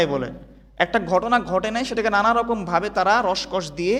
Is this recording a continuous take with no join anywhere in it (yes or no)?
yes